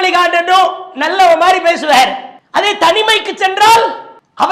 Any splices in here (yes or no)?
no